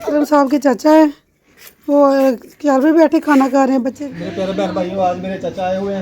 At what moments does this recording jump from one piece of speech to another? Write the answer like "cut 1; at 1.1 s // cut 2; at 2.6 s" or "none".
cut 1; at 4.0 s